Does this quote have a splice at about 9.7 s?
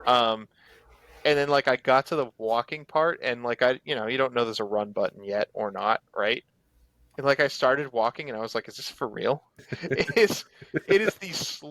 yes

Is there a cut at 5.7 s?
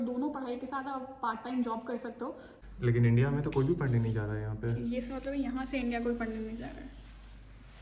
no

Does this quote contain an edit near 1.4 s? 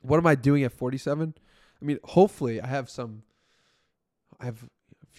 no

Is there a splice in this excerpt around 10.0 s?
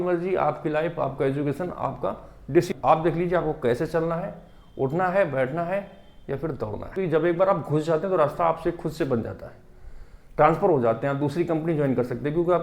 no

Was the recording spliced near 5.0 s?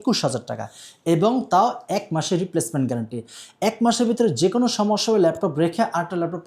no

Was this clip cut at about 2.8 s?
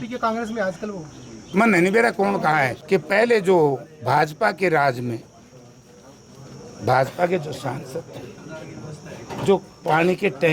yes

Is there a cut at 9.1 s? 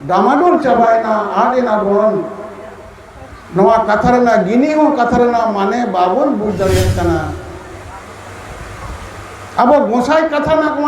no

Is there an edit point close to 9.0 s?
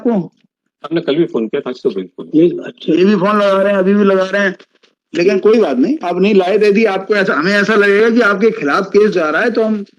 no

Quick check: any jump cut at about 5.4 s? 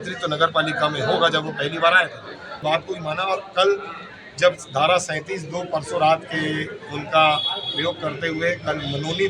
no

